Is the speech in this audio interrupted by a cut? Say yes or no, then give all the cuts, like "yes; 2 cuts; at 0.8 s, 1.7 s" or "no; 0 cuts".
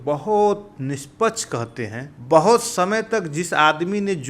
yes; 1 cut; at 2.1 s